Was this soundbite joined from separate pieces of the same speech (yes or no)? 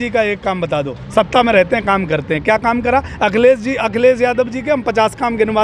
no